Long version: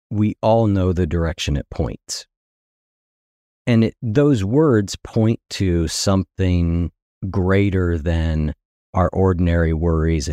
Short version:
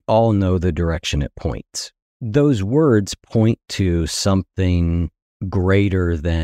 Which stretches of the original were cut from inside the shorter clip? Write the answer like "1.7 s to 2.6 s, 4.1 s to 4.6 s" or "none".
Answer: 2.5 s to 4.0 s